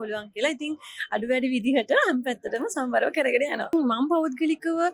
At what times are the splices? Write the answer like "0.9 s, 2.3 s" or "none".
3.7 s